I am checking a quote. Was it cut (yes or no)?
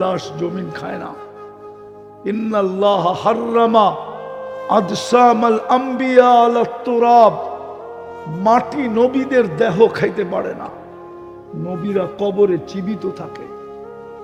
no